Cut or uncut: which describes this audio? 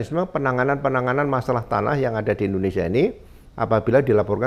uncut